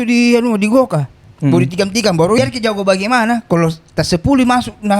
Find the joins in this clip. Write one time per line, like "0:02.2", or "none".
0:02.4